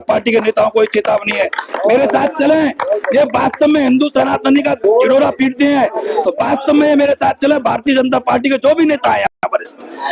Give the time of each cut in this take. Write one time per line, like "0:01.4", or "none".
none